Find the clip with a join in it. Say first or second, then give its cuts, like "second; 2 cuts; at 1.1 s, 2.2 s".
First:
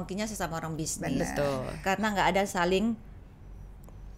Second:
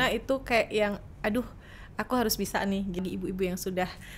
second; 1 cut; at 3.0 s